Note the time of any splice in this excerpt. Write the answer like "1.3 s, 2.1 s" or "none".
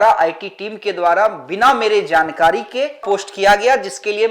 3.0 s